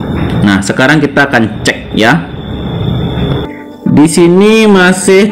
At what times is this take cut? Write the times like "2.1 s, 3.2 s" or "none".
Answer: 3.5 s